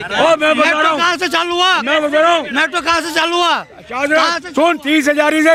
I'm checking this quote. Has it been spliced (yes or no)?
no